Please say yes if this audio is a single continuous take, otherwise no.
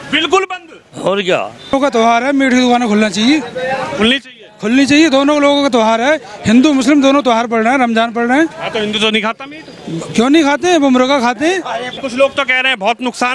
no